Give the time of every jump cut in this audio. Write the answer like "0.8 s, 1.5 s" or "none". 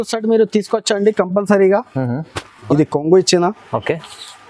2.7 s